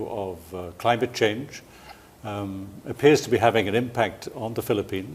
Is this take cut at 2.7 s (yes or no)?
no